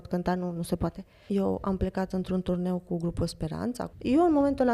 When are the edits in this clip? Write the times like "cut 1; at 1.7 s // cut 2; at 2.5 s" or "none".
cut 1; at 1.1 s // cut 2; at 3.8 s